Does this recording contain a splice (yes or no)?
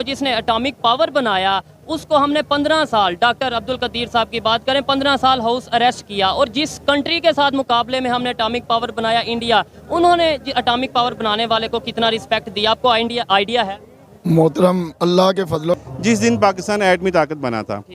yes